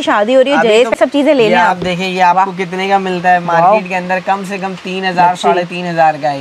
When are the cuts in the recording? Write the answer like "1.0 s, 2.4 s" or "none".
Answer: 0.9 s